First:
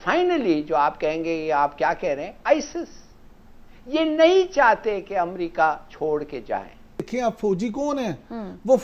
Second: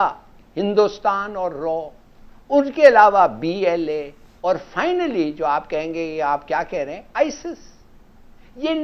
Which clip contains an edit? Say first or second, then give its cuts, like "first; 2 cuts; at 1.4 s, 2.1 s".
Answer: first; 1 cut; at 7.0 s